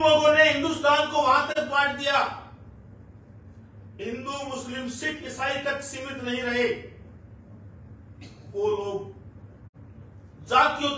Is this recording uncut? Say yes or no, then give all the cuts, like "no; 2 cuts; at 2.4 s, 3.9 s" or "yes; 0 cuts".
yes; 0 cuts